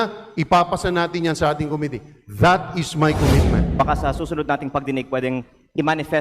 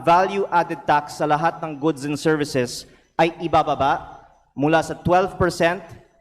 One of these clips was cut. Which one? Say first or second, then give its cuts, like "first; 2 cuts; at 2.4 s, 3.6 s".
first; 1 cut; at 3.7 s